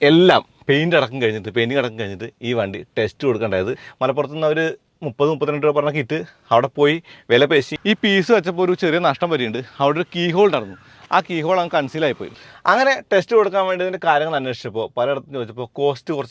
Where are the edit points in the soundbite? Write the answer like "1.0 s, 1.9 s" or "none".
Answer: 3.9 s, 7.7 s, 12.3 s

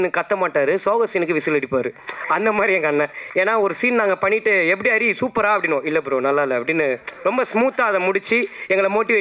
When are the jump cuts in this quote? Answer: 3.2 s

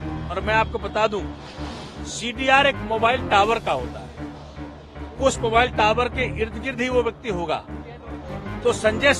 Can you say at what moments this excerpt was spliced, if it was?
none

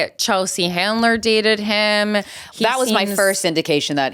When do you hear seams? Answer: none

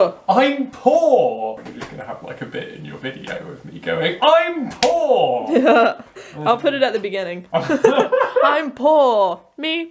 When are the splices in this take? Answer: 1.6 s

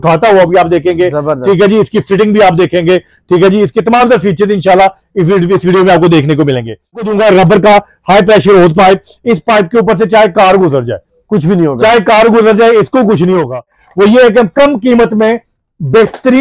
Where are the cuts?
7.0 s, 13.8 s

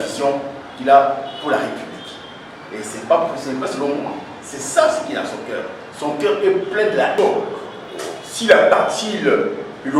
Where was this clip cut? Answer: 7.1 s

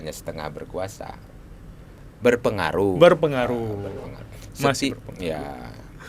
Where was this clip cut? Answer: none

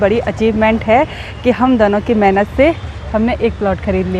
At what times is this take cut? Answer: none

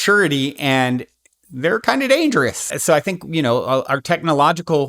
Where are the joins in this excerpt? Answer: 2.7 s

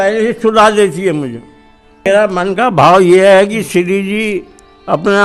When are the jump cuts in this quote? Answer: 2.1 s

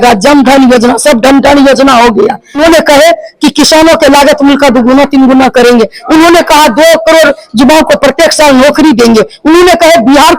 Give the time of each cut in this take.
none

